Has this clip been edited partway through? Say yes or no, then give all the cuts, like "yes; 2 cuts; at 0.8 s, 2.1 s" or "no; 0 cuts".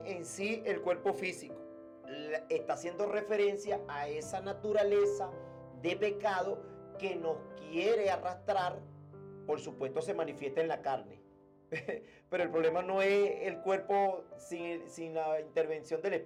no; 0 cuts